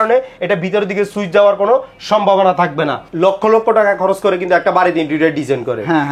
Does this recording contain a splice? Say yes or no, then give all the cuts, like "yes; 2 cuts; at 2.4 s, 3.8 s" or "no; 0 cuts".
yes; 1 cut; at 3.0 s